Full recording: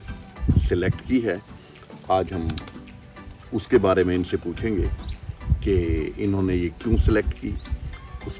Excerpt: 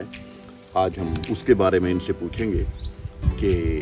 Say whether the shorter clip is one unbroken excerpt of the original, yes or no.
no